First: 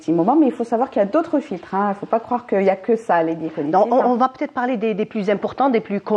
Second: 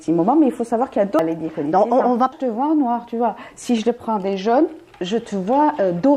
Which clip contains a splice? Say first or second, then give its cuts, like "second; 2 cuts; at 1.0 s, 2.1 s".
second; 2 cuts; at 1.2 s, 2.4 s